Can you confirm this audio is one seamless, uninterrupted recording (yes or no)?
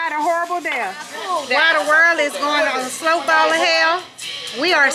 no